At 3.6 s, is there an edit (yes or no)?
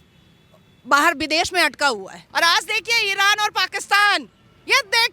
no